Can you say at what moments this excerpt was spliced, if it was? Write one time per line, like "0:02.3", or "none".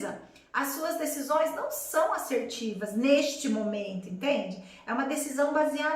none

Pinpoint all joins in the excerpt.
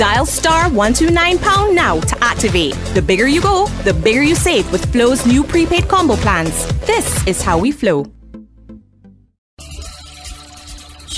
none

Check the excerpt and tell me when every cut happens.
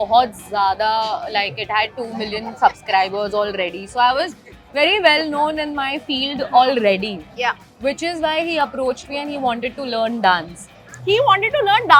none

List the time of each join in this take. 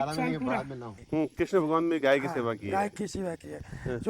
0:00.9

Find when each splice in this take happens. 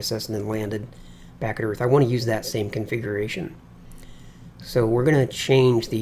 none

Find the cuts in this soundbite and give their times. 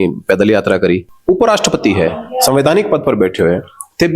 0:01.1

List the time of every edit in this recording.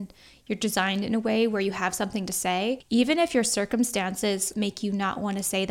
0:02.8
0:04.5

